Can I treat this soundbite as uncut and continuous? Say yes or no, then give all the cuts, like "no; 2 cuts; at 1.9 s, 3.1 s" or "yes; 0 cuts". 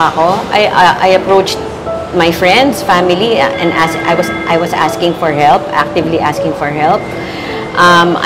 yes; 0 cuts